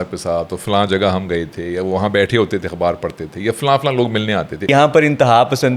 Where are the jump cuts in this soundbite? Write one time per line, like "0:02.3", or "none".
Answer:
0:04.7